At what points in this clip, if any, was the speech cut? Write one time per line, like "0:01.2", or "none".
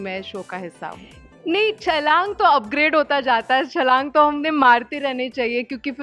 0:01.1